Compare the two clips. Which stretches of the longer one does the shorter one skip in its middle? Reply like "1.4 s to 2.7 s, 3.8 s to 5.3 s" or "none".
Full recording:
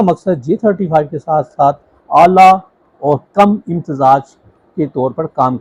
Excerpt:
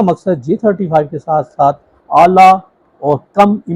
none